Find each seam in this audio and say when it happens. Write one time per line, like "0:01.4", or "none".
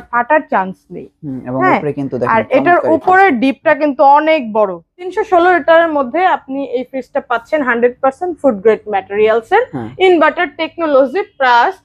0:05.2